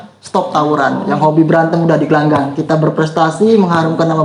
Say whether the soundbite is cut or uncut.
uncut